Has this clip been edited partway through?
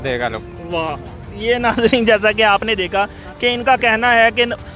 no; 0 cuts

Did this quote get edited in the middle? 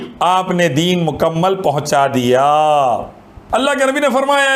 yes; 1 cut; at 3.3 s

